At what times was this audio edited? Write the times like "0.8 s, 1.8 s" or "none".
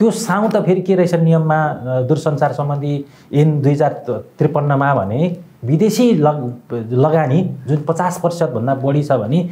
none